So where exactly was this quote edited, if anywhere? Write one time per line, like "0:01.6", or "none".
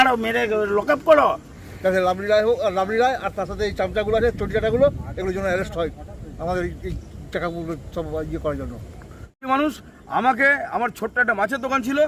0:01.5
0:09.3